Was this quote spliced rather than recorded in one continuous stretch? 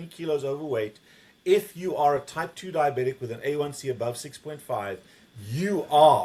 no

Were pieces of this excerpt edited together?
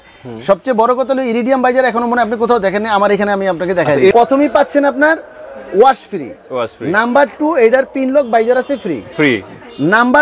yes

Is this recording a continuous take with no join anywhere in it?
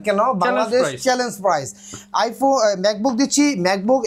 yes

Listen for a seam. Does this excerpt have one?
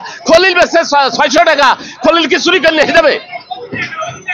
no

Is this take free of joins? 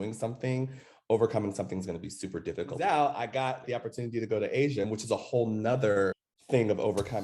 no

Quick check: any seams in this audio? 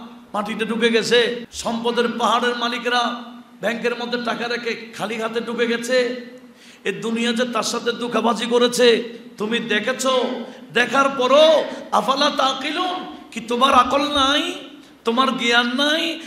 yes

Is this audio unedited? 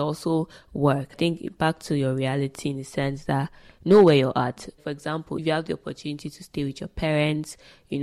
no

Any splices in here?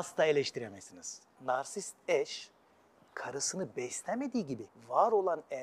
yes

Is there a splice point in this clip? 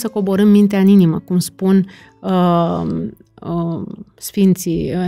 no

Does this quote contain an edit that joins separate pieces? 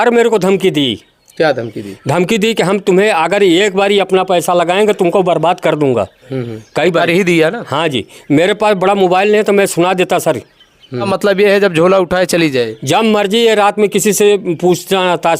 yes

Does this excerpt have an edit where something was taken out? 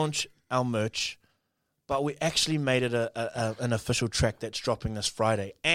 no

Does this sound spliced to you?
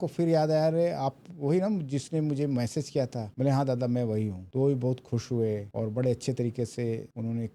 no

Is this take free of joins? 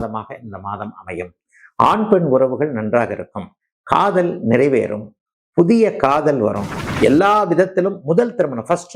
no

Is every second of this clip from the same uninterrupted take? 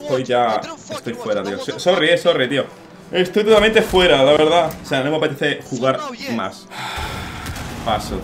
no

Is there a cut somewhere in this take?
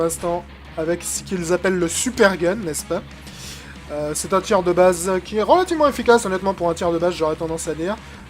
yes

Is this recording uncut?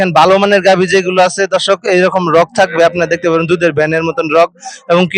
yes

